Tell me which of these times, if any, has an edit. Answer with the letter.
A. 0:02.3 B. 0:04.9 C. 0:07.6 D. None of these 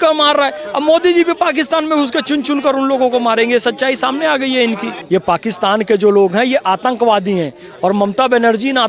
B